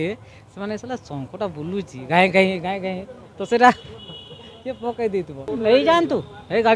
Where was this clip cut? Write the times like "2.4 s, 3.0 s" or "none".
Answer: 5.4 s

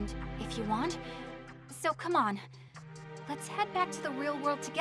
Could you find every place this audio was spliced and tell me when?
none

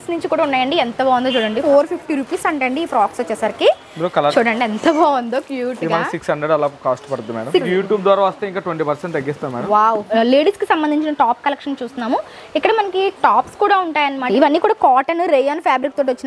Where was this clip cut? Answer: 1.6 s, 4.3 s, 7.6 s, 10.1 s, 14.3 s

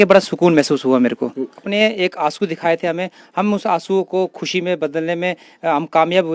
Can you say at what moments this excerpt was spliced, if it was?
1.7 s

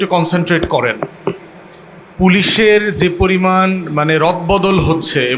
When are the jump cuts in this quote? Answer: none

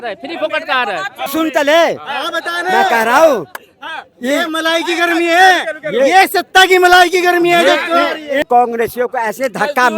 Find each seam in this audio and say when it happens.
1.3 s, 8.4 s

